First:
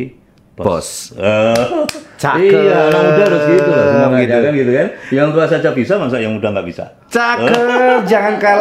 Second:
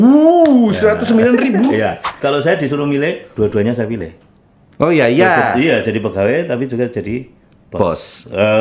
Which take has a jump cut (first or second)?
second